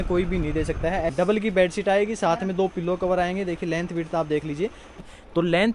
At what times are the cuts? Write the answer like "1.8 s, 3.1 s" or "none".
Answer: 1.1 s, 4.9 s